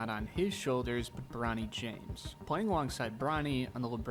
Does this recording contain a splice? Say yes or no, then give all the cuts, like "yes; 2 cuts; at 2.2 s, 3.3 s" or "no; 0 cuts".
no; 0 cuts